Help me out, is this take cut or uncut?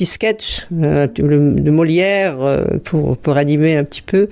uncut